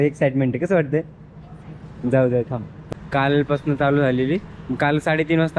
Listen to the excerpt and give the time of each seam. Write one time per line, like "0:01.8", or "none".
0:02.8